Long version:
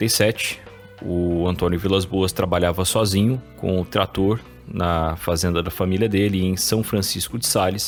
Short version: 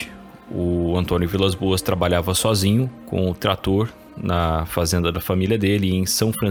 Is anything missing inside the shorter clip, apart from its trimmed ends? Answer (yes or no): no